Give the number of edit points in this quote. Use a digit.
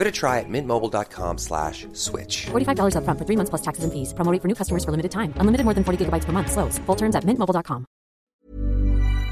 1